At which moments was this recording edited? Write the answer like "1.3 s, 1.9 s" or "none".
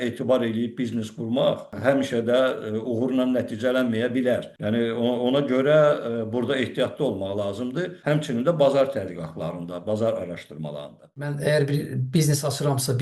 1.7 s, 4.5 s, 8.0 s, 11.3 s